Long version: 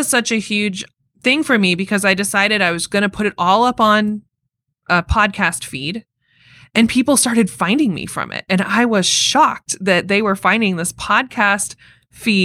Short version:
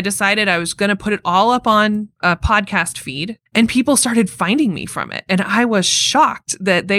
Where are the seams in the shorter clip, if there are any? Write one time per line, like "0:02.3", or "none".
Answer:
0:02.1
0:03.3